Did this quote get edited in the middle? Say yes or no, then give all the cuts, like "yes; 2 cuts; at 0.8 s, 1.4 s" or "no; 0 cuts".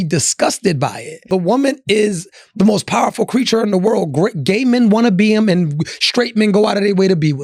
yes; 1 cut; at 1.2 s